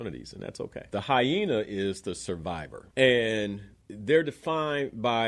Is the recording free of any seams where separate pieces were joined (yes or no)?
no